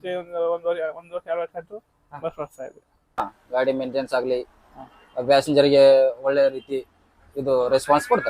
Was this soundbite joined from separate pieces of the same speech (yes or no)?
yes